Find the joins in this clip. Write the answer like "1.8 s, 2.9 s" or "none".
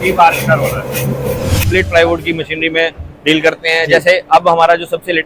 1.7 s